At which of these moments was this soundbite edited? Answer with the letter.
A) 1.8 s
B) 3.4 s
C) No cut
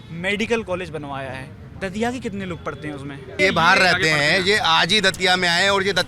B